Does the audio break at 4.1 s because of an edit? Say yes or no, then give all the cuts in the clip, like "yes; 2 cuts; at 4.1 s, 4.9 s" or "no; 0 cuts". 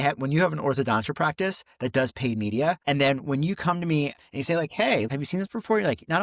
yes; 3 cuts; at 2.8 s, 4.1 s, 5.1 s